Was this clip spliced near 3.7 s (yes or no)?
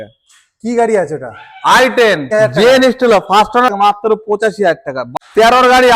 yes